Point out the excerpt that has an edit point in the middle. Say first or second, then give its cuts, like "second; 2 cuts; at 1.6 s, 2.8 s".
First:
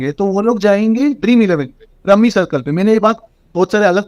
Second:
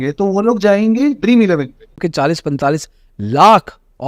second; 1 cut; at 2.0 s